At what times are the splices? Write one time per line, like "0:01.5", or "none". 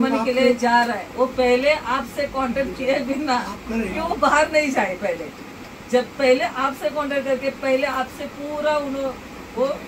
none